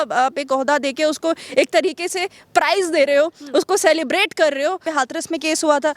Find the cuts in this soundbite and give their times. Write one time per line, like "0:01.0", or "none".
0:04.8